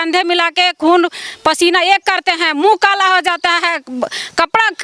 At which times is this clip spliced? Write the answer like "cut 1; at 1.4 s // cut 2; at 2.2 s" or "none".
none